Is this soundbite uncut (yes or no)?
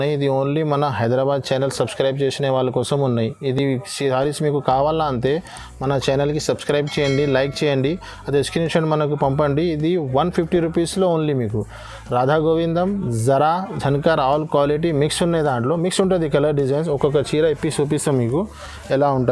yes